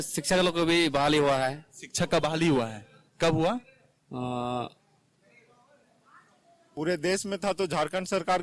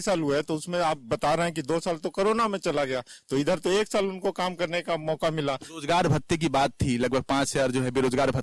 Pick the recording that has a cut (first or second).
first